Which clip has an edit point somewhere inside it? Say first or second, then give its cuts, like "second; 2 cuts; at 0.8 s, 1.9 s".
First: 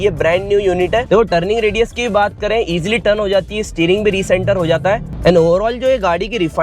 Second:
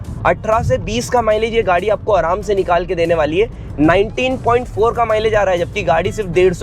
first; 2 cuts; at 1.0 s, 5.1 s